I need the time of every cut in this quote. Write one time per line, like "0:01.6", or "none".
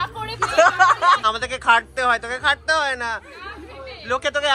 0:01.2